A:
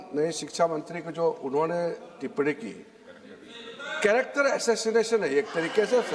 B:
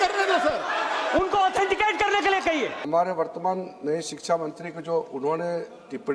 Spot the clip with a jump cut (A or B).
B